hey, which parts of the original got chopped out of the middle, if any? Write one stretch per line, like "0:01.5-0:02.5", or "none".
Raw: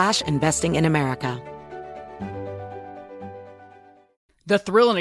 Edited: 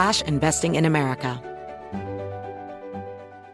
0:01.4-0:01.7